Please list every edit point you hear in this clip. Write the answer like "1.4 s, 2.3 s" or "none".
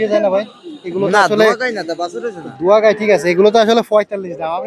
none